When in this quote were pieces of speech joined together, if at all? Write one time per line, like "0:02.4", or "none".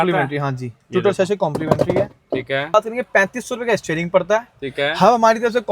0:02.7